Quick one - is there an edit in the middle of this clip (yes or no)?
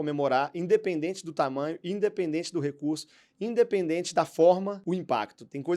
yes